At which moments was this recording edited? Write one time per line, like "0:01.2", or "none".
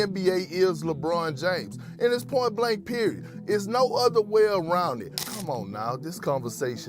0:05.1